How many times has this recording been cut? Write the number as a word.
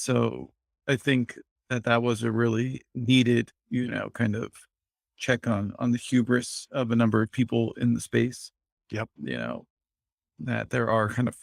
zero